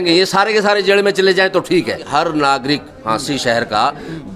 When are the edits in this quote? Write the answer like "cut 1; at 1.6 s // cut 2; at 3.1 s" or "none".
cut 1; at 2.1 s